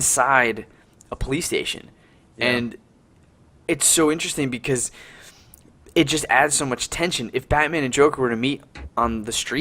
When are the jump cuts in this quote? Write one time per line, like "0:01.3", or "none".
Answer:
0:01.4